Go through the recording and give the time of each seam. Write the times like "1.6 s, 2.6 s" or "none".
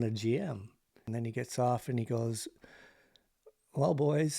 1.0 s

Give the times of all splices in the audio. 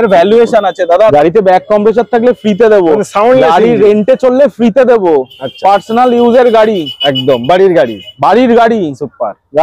1.1 s

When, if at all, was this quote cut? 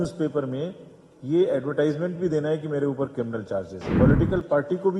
3.8 s

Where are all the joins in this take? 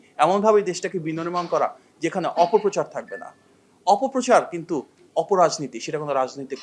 none

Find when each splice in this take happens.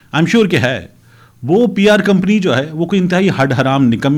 none

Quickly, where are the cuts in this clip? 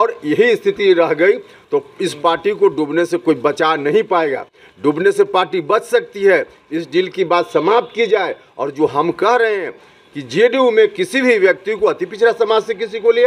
none

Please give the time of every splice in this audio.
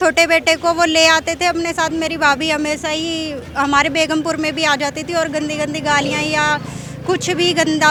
none

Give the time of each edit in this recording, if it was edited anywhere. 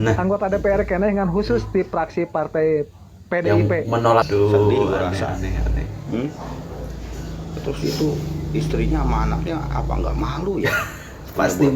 4.3 s

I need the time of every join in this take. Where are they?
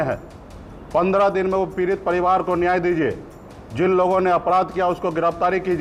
none

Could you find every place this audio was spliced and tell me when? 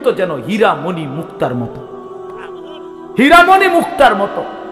1.7 s, 3.1 s

